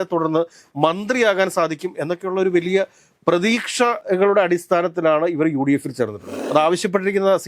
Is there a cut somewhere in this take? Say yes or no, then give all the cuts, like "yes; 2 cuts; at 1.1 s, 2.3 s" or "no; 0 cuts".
yes; 2 cuts; at 4.0 s, 6.4 s